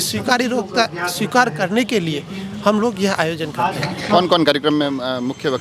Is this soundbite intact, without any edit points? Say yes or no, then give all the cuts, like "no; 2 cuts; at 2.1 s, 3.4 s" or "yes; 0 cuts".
yes; 0 cuts